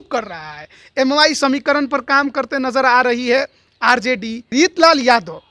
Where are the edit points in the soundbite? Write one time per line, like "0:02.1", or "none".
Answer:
0:04.5